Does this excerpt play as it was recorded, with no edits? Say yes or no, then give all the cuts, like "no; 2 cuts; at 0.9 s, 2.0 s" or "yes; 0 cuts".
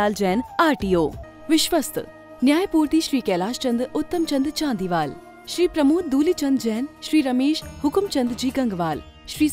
no; 1 cut; at 1.2 s